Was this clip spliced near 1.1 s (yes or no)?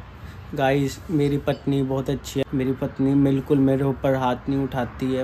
no